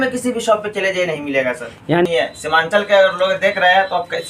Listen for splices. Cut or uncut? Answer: cut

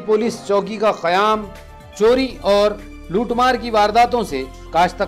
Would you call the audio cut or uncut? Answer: uncut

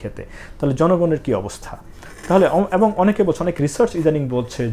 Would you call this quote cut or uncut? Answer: uncut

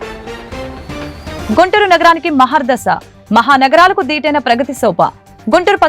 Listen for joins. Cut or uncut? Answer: cut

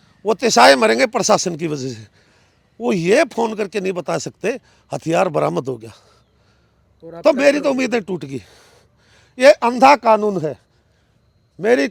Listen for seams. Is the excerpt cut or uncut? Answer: uncut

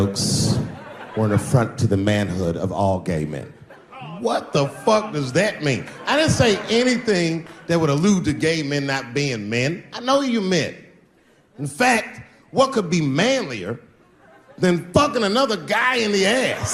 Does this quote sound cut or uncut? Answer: uncut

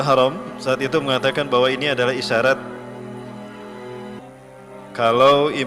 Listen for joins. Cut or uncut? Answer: cut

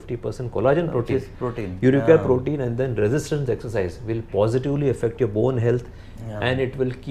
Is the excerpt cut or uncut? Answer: uncut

